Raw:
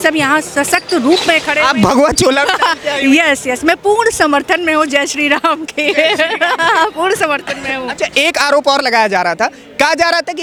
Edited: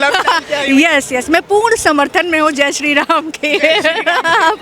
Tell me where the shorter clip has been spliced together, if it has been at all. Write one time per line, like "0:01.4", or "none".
none